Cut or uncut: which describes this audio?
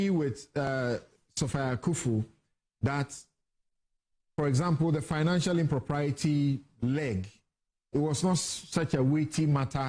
uncut